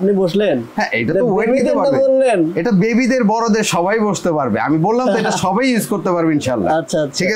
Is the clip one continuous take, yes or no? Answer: yes